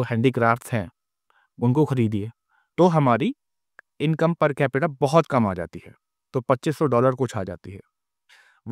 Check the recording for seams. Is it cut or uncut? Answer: cut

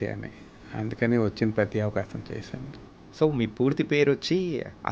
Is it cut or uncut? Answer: cut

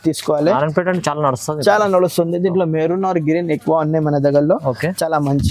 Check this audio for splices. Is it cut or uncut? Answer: uncut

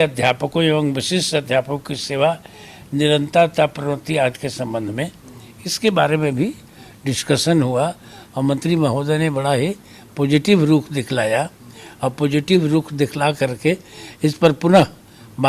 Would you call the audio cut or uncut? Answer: uncut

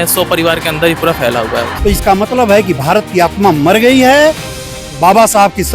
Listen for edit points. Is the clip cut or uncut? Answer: cut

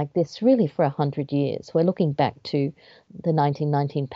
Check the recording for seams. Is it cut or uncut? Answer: uncut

